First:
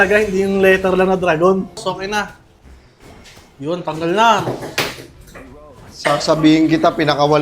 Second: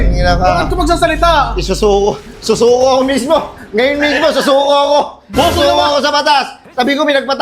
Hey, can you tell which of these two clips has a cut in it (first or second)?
first